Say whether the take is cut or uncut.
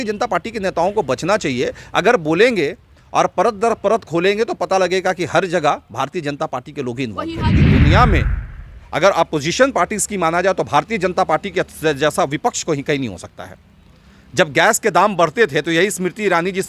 cut